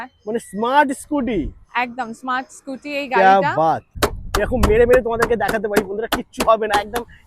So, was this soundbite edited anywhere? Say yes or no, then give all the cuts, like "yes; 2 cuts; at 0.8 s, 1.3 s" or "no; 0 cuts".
yes; 1 cut; at 3.9 s